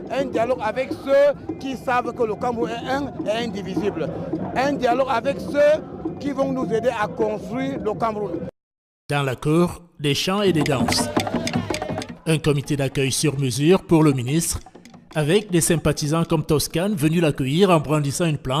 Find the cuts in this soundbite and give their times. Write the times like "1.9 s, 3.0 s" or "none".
none